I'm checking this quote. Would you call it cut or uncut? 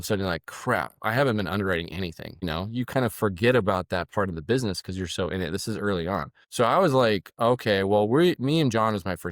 uncut